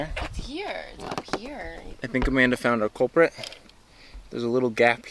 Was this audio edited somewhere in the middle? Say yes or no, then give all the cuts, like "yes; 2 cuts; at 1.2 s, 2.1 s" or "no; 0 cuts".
yes; 1 cut; at 1.8 s